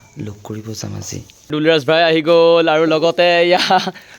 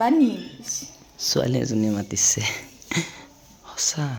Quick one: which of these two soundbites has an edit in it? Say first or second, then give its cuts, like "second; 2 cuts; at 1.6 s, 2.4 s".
first; 1 cut; at 1.5 s